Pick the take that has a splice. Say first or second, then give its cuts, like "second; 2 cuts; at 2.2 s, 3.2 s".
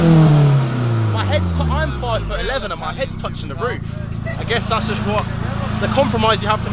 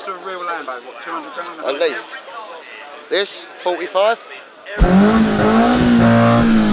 second; 1 cut; at 4.8 s